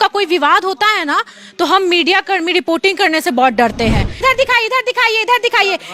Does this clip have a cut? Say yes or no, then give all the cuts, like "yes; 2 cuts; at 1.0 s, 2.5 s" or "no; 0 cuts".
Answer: yes; 1 cut; at 4.2 s